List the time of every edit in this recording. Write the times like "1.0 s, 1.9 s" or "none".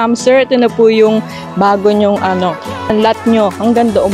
2.9 s